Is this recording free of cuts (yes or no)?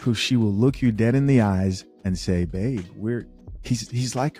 yes